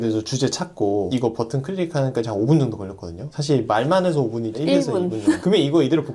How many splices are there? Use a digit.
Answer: 0